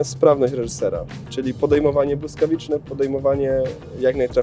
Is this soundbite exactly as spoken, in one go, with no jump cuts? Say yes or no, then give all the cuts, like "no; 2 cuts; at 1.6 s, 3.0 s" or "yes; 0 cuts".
yes; 0 cuts